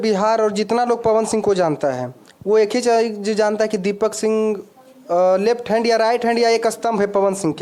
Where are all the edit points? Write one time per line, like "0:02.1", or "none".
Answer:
none

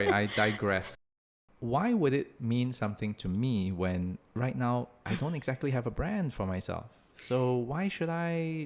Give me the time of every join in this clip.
0:00.9
0:05.0

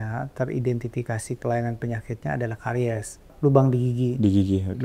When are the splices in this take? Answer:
0:03.3

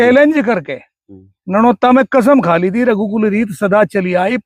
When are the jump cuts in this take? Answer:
none

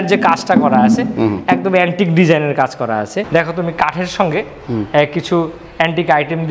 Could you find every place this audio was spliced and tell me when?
0:03.3

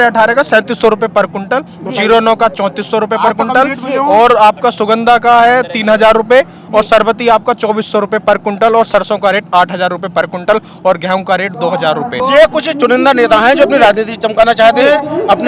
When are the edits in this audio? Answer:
0:12.2

